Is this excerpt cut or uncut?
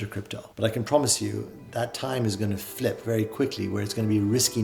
uncut